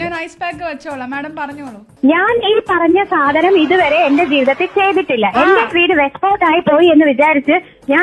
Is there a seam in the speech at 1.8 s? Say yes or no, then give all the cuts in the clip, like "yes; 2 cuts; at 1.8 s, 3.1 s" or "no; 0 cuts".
yes; 1 cut; at 1.8 s